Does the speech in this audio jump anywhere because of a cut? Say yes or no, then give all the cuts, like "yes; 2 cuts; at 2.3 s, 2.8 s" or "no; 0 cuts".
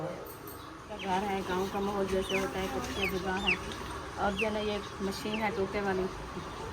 yes; 1 cut; at 0.9 s